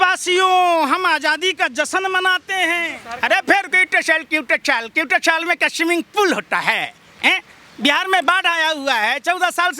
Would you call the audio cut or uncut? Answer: cut